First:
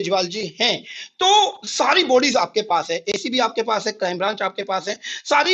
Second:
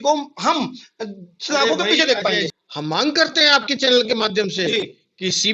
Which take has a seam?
second; 1 cut; at 2.6 s

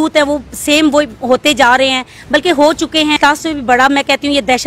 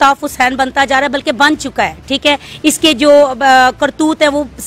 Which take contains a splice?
first; 1 cut; at 3.2 s

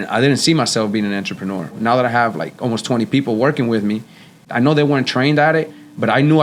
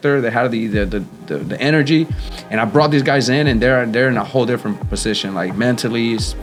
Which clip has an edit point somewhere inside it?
first; 2 cuts; at 1.8 s, 4.5 s

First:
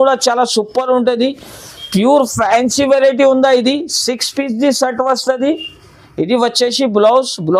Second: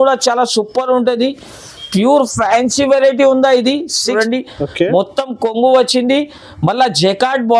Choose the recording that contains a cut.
second; 1 cut; at 4.1 s

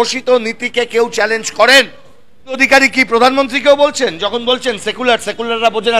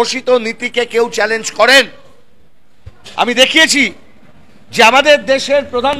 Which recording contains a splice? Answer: first; 1 cut; at 2.6 s

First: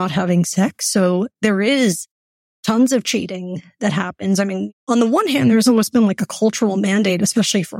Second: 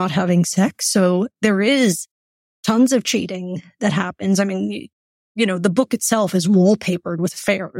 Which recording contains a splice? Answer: first; 1 cut; at 4.7 s

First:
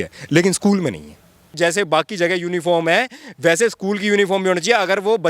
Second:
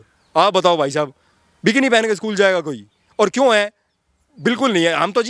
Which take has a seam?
first; 1 cut; at 1.6 s

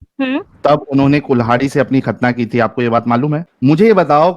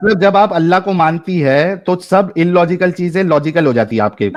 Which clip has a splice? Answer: first; 1 cut; at 3.5 s

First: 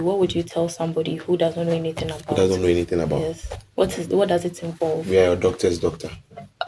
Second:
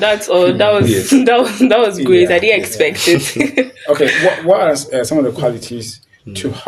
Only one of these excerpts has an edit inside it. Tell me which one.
second; 1 cut; at 4.1 s

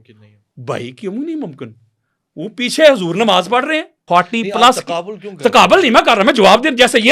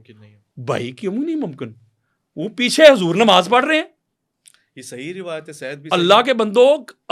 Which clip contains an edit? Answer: first; 1 cut; at 3.9 s

